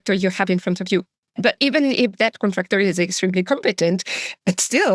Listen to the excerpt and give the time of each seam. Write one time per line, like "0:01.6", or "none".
0:01.5

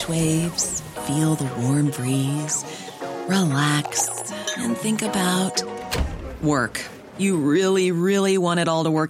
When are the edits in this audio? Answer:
none

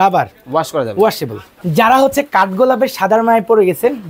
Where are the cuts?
0:01.6

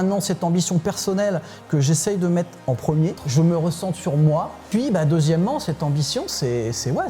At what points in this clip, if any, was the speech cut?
0:03.2
0:04.7

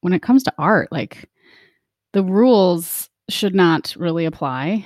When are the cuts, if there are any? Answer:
none

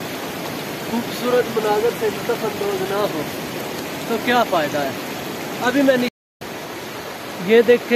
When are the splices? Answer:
0:06.1

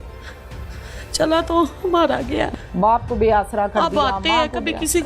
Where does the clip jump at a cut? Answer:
0:02.5

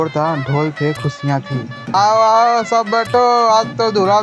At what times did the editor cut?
0:01.9

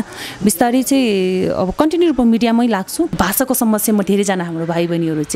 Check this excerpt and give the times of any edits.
0:03.1

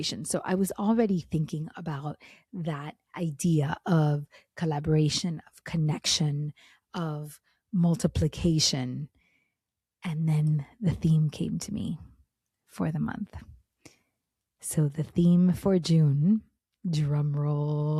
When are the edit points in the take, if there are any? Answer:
none

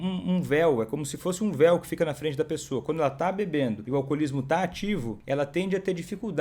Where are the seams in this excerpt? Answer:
0:03.8
0:05.1

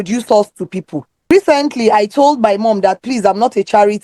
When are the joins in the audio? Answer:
0:01.3

